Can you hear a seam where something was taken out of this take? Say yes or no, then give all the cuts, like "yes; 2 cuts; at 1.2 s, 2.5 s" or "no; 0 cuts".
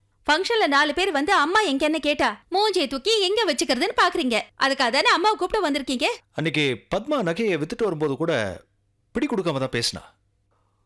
yes; 1 cut; at 6.3 s